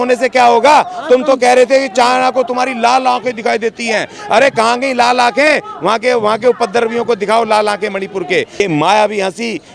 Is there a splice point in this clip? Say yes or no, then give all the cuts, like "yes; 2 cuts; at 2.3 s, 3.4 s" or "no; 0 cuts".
yes; 1 cut; at 8.6 s